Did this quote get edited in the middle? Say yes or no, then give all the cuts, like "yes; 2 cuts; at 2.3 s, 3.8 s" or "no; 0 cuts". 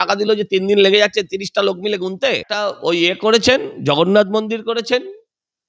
yes; 1 cut; at 2.5 s